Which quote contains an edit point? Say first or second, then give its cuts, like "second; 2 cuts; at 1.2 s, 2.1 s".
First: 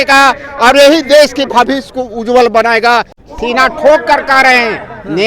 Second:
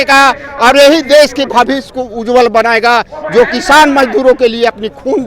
first; 1 cut; at 3.2 s